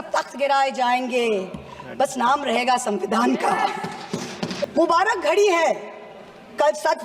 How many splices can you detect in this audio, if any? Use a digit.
1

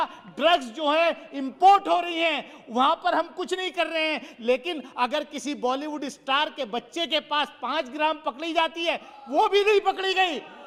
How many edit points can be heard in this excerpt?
0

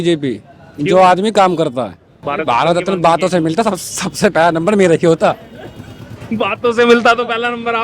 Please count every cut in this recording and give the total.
1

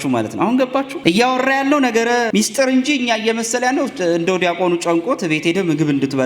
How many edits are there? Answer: 2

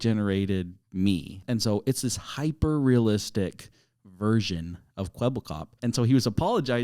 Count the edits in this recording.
2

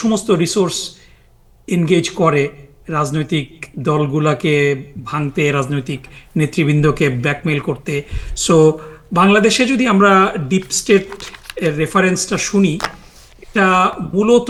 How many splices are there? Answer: 0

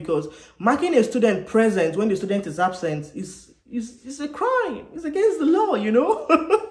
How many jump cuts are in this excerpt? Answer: 0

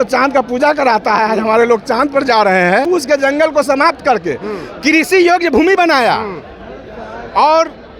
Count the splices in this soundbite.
1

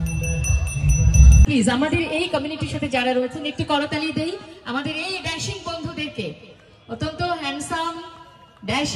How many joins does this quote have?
1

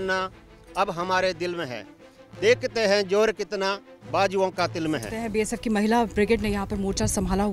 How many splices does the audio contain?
1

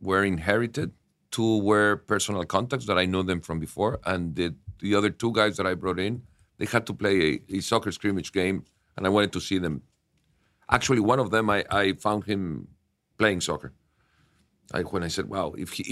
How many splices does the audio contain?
1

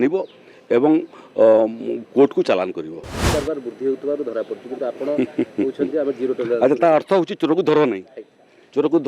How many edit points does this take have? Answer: 1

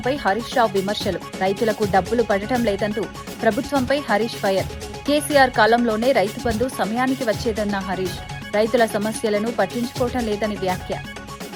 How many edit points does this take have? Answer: 0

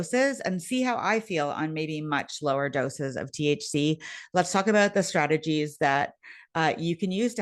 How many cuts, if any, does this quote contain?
0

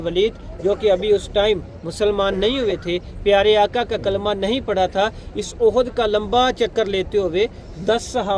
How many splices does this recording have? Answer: 0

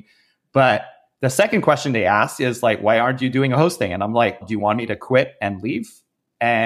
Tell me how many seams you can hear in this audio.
1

